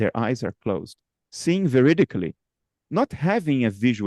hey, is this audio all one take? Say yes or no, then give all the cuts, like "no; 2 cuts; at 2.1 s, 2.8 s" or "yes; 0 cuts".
yes; 0 cuts